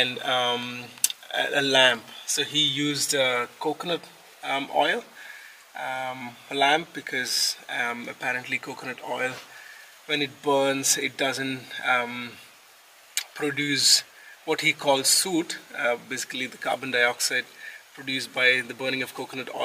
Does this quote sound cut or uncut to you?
uncut